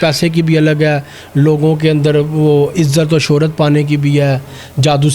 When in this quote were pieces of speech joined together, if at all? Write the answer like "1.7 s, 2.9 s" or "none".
none